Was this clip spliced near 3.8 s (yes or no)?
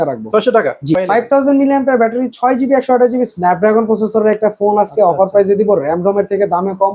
no